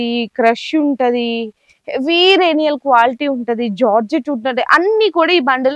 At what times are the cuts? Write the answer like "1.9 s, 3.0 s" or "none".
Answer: none